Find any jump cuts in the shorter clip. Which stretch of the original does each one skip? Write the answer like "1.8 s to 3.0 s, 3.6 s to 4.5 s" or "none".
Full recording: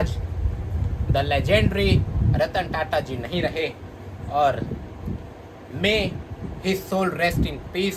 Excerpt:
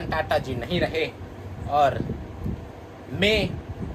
none